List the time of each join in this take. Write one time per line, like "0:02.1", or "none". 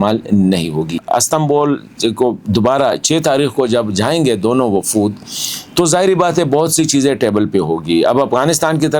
0:01.0